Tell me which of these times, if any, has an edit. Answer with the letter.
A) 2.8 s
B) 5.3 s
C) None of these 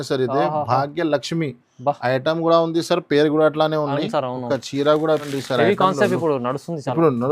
B